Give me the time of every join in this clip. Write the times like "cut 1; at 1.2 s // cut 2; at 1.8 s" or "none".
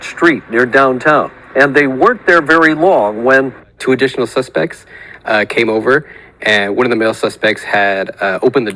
none